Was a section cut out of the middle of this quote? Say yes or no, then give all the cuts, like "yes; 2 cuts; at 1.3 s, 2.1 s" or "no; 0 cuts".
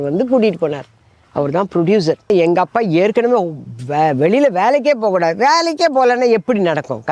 yes; 1 cut; at 2.3 s